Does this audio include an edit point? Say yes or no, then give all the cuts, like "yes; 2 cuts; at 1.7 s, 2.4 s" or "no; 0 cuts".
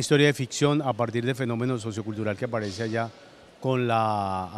no; 0 cuts